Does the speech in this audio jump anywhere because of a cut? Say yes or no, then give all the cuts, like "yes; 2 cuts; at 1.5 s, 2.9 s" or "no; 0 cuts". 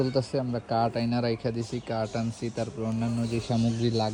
no; 0 cuts